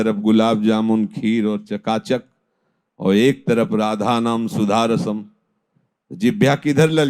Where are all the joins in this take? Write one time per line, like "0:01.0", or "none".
none

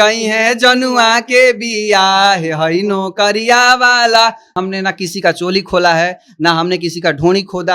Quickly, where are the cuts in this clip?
0:04.5

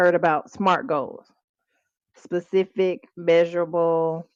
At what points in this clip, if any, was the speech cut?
none

